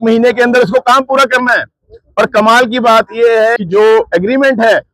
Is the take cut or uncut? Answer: cut